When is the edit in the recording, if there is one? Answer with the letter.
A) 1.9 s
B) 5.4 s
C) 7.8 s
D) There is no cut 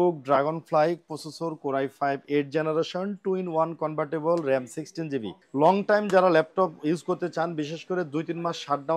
B